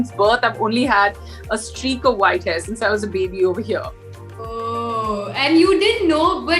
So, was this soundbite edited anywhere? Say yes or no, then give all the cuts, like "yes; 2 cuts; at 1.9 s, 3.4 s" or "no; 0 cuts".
no; 0 cuts